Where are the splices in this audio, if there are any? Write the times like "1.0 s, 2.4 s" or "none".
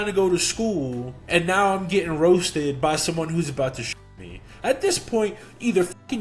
1.1 s

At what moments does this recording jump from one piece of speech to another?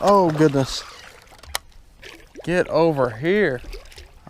2.0 s

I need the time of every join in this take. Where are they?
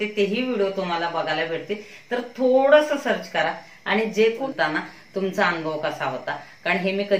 4.5 s

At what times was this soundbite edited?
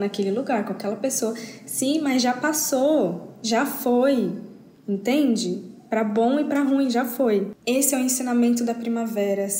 7.5 s

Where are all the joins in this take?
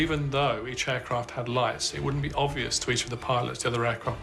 none

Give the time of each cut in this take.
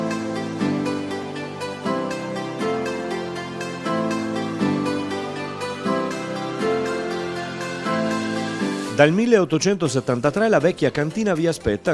8.9 s

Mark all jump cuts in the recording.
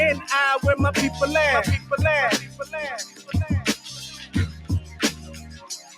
1.5 s

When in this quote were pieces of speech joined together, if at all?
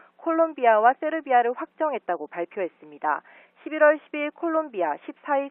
none

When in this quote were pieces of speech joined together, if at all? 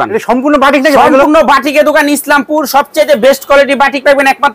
none

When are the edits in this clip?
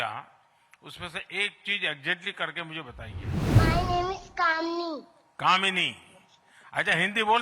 3.5 s

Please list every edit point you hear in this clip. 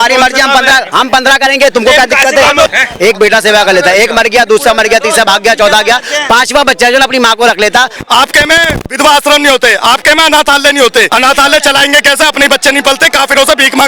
2.7 s, 7.9 s, 11.1 s

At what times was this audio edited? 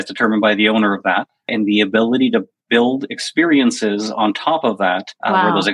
1.5 s

